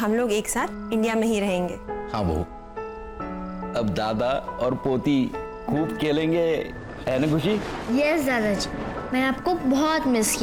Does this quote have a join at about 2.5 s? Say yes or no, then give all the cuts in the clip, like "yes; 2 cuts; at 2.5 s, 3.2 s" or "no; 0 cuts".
no; 0 cuts